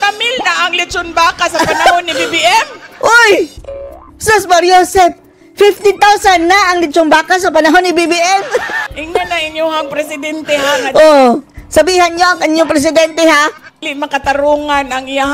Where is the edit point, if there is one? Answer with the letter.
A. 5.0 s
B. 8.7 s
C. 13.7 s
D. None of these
B